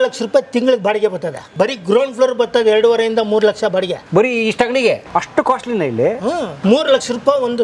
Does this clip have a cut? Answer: yes; 4 cuts; at 1.4 s, 4.0 s, 5.0 s, 6.5 s

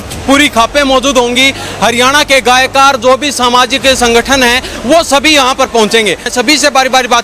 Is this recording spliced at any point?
yes; 1 cut; at 6.3 s

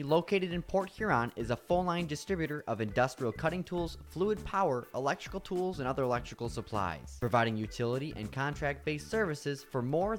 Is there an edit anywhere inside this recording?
no; 0 cuts

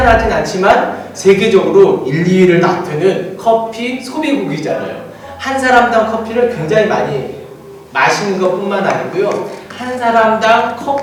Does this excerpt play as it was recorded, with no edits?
yes; 0 cuts

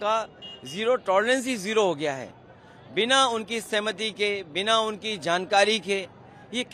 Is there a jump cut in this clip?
no; 0 cuts

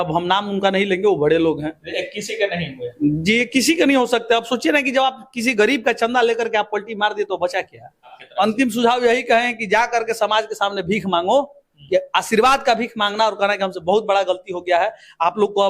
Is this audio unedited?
no; 1 cut; at 8.2 s

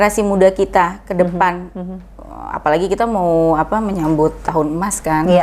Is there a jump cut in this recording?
no; 0 cuts

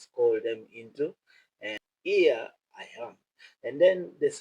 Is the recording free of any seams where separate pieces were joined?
no; 1 cut; at 1.9 s

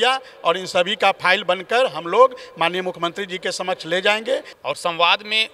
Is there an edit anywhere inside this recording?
yes; 1 cut; at 4.5 s

